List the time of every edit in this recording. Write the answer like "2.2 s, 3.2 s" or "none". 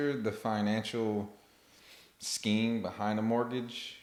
none